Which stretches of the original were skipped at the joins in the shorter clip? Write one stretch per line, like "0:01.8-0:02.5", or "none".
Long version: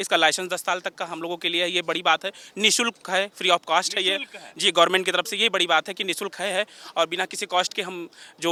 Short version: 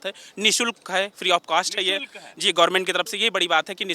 none